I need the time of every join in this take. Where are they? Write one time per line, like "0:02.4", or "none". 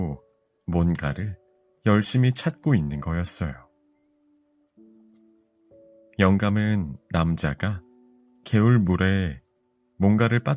none